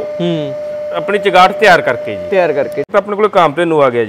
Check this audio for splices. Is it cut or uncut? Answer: cut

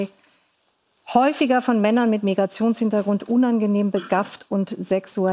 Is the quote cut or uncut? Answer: uncut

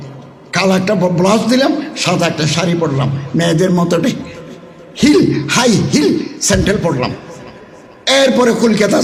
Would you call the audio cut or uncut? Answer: uncut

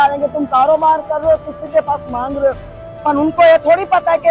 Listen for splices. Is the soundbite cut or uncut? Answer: uncut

